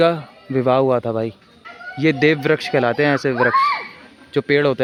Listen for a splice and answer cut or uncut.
uncut